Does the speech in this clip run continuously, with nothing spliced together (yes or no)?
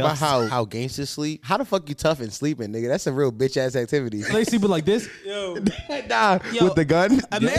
no